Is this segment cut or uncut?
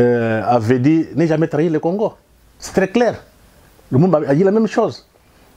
uncut